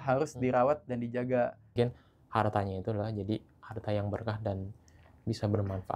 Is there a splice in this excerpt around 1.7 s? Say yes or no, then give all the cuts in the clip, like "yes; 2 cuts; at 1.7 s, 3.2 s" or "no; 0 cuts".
yes; 1 cut; at 1.7 s